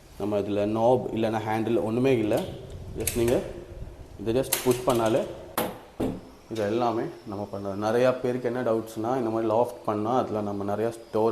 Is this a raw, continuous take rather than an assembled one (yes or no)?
no